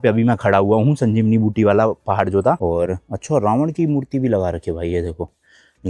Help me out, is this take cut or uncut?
cut